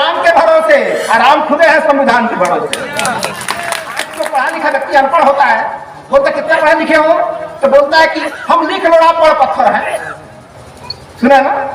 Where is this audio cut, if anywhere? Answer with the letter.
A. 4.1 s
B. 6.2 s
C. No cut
A